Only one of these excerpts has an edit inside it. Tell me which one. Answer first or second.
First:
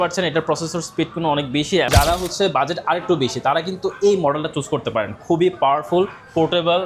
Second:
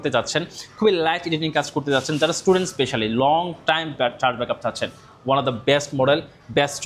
first